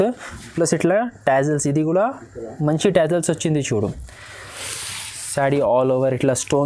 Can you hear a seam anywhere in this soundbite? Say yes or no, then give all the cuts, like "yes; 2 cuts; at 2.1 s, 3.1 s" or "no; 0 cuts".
no; 0 cuts